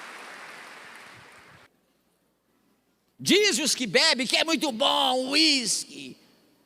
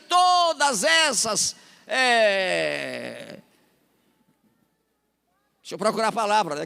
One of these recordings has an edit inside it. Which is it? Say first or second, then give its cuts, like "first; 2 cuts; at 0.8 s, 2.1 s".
first; 1 cut; at 1.7 s